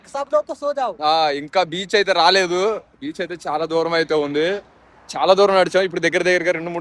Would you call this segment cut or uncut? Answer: uncut